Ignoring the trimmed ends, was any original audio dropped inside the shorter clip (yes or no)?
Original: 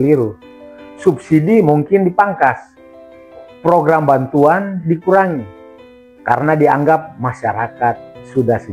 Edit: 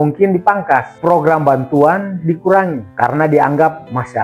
yes